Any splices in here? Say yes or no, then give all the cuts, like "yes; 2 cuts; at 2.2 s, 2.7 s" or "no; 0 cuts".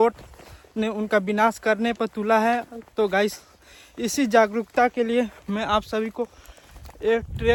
no; 0 cuts